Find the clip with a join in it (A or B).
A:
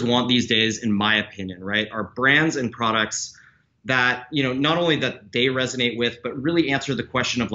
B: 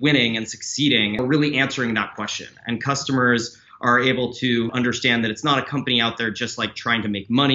B